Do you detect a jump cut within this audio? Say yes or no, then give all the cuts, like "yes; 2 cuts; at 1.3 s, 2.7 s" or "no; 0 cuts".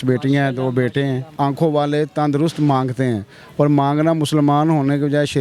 yes; 1 cut; at 1.3 s